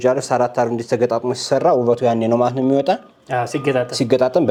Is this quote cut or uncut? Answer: uncut